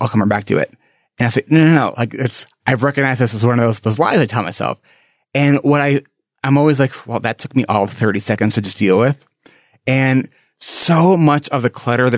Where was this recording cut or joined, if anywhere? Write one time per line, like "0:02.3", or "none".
none